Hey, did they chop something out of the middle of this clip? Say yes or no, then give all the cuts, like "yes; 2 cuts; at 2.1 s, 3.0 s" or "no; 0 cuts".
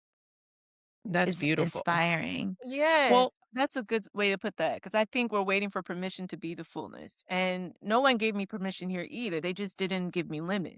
no; 0 cuts